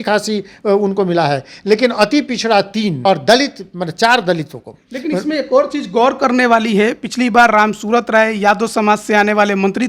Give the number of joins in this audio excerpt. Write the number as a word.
one